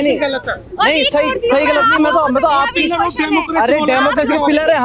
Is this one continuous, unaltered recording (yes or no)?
yes